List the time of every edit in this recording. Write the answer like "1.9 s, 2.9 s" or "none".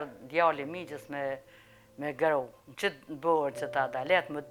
none